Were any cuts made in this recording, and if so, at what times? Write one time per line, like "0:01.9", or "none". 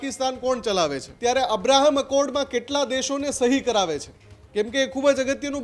0:01.1